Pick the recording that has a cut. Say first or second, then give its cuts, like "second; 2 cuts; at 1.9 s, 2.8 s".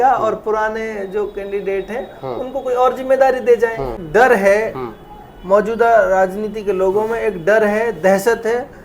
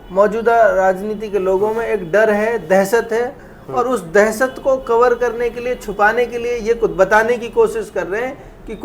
first; 1 cut; at 4.0 s